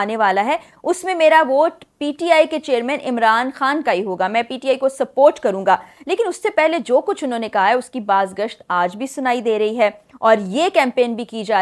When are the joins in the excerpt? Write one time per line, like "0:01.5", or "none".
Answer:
none